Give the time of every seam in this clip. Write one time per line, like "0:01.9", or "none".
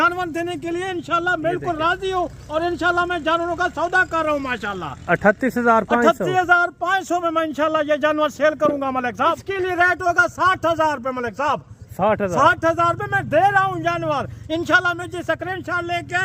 0:09.4